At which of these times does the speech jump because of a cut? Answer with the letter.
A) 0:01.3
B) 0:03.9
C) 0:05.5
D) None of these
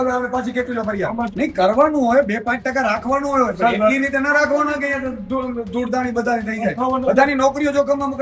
A